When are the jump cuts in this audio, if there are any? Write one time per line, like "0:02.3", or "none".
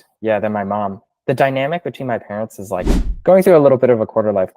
0:03.1